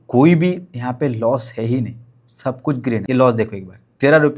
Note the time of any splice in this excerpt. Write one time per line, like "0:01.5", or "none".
0:03.0